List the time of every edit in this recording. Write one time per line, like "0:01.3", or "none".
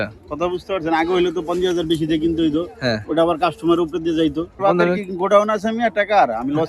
0:04.6